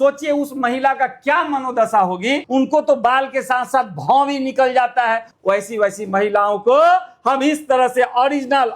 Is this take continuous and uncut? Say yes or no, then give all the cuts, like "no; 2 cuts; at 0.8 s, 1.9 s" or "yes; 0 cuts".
no; 2 cuts; at 2.4 s, 5.3 s